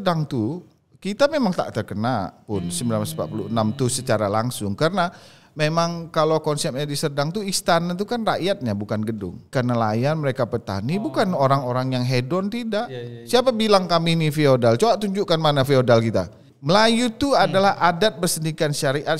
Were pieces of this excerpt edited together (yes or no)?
yes